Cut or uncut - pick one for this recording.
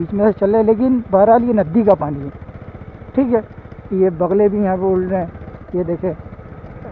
uncut